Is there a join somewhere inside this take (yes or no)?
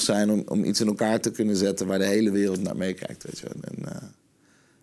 no